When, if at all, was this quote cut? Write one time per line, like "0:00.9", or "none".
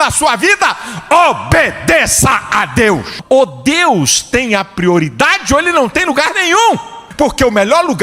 0:03.1
0:07.0